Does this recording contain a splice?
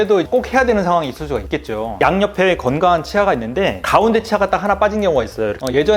yes; 1 cut; at 2.0 s

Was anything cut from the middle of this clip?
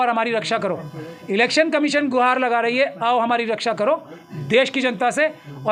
no; 0 cuts

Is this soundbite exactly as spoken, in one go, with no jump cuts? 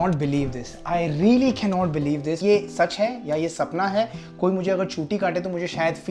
yes; 0 cuts

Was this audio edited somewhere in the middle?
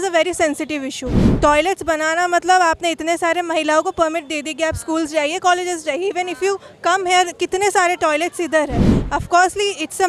no; 0 cuts

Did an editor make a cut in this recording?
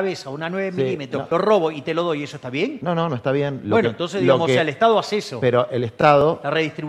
yes; 2 cuts; at 1.2 s, 2.8 s

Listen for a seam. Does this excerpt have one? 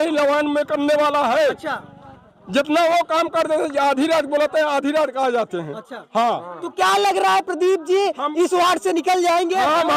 no; 0 cuts

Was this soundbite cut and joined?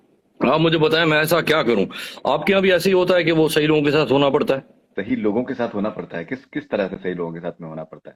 no; 0 cuts

